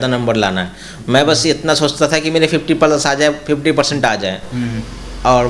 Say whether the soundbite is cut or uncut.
uncut